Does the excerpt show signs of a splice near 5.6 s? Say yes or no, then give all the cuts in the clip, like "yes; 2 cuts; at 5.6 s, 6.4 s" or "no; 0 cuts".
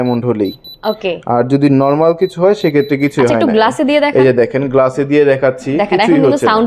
no; 0 cuts